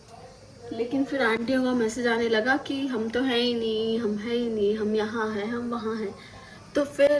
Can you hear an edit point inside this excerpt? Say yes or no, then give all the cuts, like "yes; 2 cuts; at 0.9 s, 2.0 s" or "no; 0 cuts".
no; 0 cuts